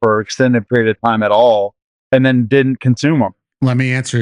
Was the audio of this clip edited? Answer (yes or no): yes